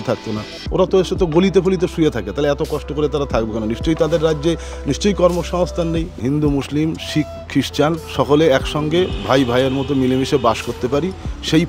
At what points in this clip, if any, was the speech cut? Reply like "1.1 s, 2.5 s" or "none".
6.1 s, 8.0 s